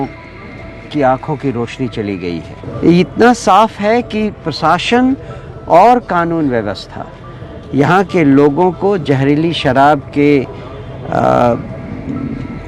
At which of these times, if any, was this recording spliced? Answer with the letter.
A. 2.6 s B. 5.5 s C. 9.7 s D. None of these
A